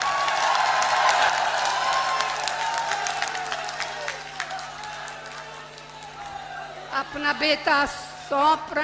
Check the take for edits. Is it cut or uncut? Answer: uncut